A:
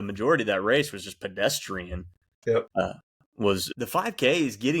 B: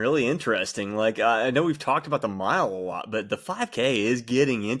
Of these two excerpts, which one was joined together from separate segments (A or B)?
A